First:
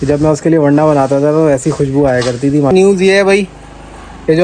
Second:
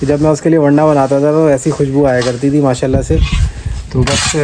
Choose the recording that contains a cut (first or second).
first